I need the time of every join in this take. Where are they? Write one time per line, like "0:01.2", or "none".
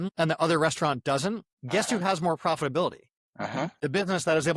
0:01.5
0:03.7